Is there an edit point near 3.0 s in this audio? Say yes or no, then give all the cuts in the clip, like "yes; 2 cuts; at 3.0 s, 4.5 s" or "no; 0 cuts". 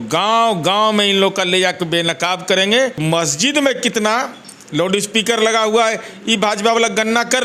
yes; 1 cut; at 3.0 s